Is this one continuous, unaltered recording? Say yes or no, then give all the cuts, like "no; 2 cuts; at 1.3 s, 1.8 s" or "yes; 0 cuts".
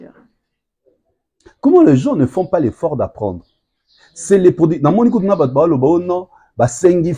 yes; 0 cuts